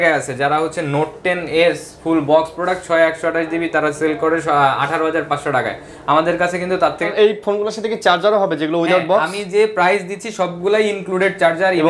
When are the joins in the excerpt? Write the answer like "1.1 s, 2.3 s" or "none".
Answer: 7.1 s